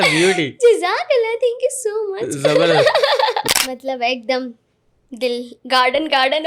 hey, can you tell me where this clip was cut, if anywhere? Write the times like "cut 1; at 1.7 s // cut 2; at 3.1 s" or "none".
cut 1; at 3.4 s